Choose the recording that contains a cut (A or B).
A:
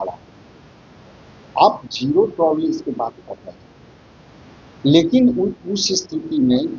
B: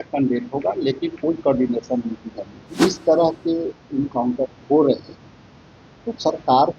B